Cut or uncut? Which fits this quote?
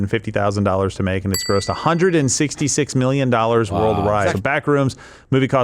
cut